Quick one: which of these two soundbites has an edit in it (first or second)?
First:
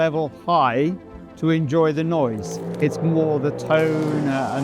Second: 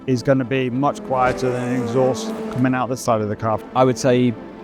second